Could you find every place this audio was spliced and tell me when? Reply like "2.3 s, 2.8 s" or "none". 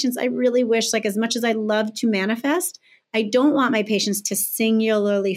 none

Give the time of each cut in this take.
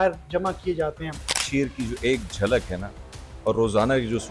1.3 s

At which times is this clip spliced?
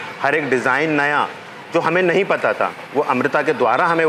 none

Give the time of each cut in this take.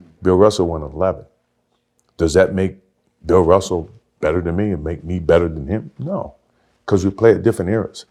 none

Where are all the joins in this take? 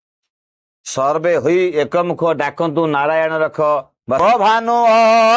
4.2 s

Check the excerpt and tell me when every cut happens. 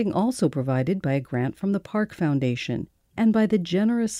3.0 s

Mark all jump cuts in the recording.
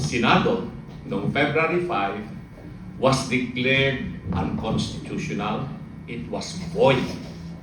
none

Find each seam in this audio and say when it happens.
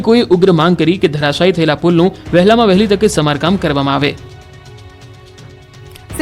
1.2 s

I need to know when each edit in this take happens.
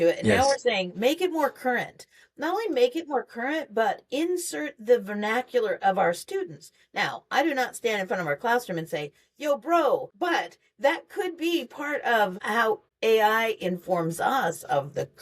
10.1 s, 12.7 s

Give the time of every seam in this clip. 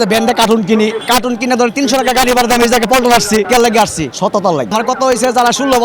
4.7 s

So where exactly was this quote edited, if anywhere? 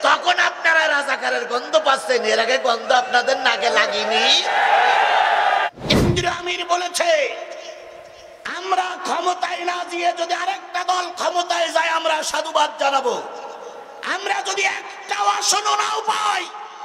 5.8 s

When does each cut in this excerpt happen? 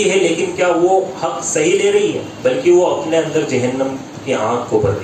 none

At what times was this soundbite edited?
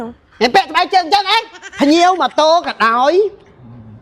1.6 s

